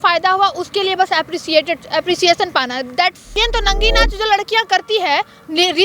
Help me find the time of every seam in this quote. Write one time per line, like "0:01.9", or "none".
0:03.3